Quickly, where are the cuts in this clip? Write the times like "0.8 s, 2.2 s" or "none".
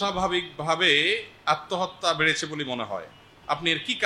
none